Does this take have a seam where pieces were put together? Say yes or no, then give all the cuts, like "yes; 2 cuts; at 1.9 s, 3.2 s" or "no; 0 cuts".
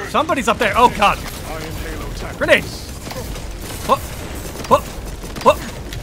no; 0 cuts